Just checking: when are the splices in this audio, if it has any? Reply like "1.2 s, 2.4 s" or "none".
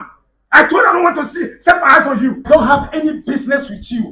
2.4 s